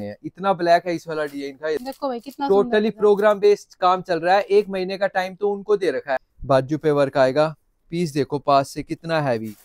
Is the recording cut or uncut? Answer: cut